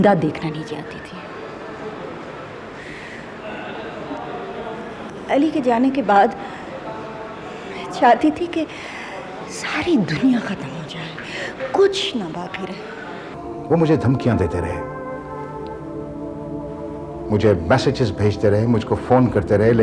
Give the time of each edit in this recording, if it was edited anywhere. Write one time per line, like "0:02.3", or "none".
0:13.4

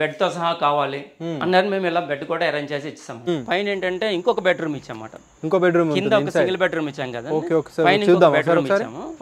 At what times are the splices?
0:03.2

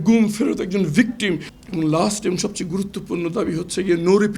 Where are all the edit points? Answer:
0:01.5

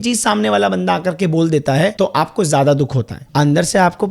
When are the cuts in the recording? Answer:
0:01.9
0:03.3

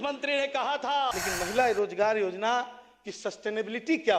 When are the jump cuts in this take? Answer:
0:01.2

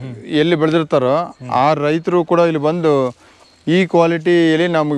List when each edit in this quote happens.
none

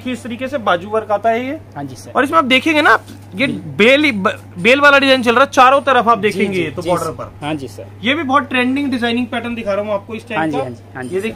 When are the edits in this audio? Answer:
none

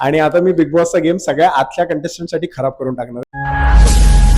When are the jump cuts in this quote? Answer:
0:03.1

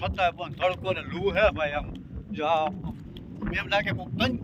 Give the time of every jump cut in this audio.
none

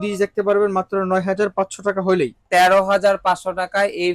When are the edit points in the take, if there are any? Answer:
0:02.4

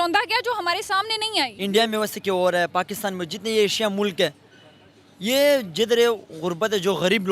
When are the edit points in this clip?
0:01.6

